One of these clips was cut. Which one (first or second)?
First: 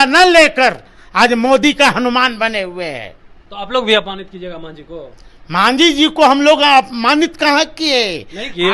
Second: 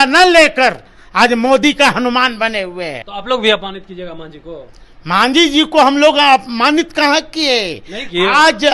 second